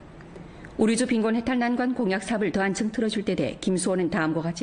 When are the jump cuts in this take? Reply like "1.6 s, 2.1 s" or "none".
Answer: 3.1 s